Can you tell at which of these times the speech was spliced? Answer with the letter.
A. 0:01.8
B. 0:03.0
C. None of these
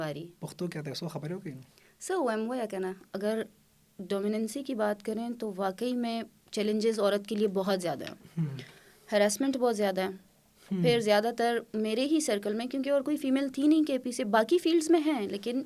B